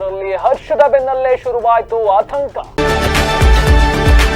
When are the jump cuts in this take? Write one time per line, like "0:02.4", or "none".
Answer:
0:02.6